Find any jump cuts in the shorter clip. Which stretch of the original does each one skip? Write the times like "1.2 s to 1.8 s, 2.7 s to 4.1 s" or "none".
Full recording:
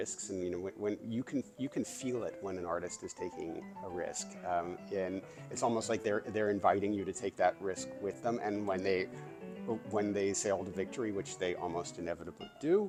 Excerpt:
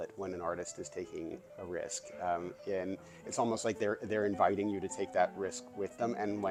none